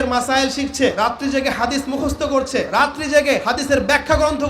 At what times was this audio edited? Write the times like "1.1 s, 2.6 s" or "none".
1.0 s, 2.7 s, 3.4 s